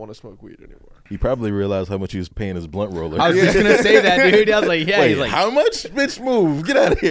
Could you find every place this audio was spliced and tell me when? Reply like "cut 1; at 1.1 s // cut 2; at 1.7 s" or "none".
cut 1; at 1.0 s // cut 2; at 2.3 s